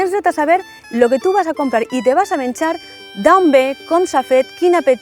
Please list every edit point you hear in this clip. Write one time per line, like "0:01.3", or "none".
none